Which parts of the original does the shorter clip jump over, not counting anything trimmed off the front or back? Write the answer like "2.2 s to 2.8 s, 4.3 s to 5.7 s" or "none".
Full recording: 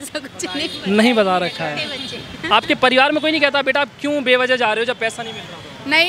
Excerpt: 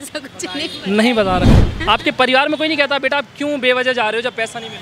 1.6 s to 2.2 s